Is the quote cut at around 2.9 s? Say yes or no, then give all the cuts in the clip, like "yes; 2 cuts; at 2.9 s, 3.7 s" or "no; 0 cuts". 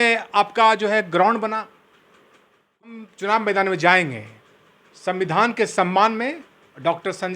yes; 1 cut; at 2.9 s